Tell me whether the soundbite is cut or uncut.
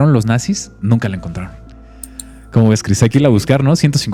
uncut